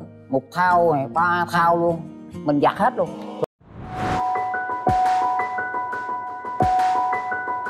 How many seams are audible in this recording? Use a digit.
0